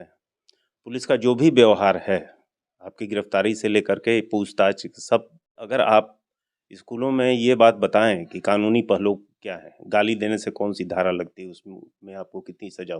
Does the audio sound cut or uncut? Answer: cut